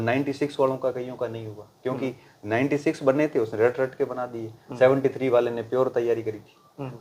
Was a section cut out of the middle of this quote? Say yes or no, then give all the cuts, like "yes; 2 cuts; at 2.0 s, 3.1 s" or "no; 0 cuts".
no; 0 cuts